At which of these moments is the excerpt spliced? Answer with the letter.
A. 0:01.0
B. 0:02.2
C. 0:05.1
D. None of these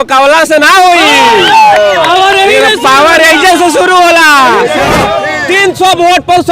C